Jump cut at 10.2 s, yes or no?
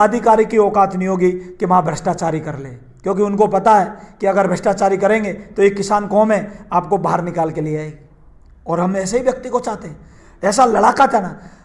no